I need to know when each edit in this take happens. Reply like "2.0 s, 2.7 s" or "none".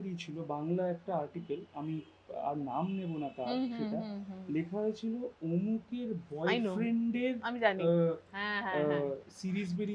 none